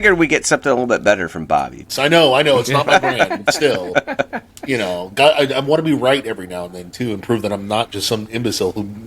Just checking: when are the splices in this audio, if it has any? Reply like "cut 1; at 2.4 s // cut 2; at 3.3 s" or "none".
cut 1; at 1.8 s